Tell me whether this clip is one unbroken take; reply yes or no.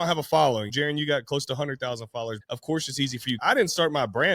no